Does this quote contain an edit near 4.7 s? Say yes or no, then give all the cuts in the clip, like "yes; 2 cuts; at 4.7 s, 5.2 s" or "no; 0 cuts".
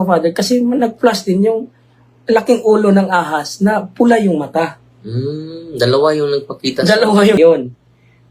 no; 1 cut; at 7.4 s